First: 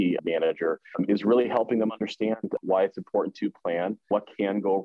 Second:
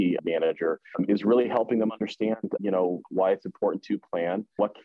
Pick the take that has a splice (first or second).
first